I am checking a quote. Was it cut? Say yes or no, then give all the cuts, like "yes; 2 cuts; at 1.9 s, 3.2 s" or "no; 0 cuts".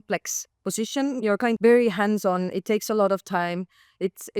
yes; 1 cut; at 1.6 s